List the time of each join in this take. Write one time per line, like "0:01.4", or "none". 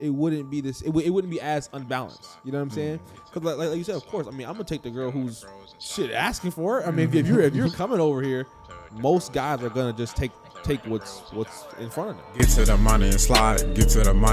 0:12.4